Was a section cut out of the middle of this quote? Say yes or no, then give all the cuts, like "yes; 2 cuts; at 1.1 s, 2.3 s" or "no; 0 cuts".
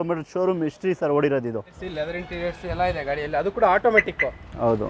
yes; 1 cut; at 1.8 s